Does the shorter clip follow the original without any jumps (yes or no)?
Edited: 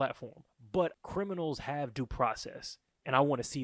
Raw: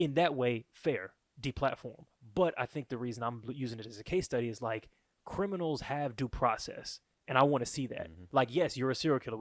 no